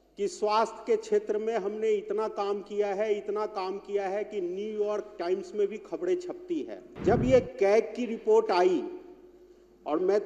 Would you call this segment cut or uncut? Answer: cut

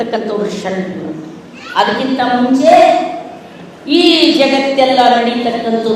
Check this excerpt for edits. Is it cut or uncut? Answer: uncut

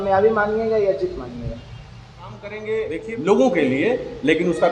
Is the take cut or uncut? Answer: cut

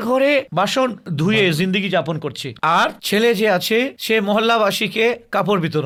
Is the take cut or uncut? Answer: uncut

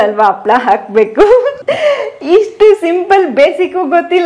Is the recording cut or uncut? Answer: cut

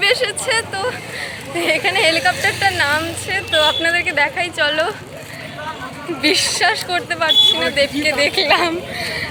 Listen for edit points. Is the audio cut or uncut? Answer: uncut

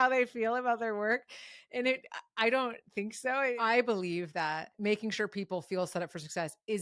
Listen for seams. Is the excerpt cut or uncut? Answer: cut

